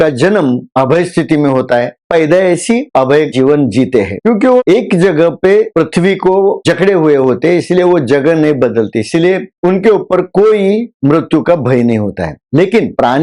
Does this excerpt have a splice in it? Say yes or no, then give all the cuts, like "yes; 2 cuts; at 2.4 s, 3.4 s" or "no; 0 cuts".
yes; 2 cuts; at 2.0 s, 3.3 s